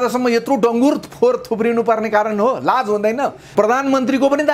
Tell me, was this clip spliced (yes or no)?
yes